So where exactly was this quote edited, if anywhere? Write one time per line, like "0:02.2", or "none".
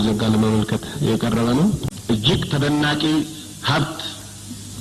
0:01.9